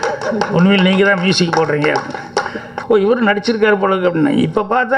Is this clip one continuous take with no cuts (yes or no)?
no